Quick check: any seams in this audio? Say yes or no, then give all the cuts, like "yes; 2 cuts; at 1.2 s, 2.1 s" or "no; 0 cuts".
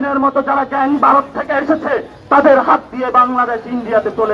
no; 0 cuts